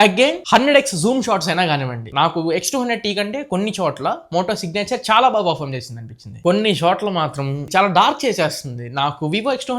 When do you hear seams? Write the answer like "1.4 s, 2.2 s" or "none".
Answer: 6.3 s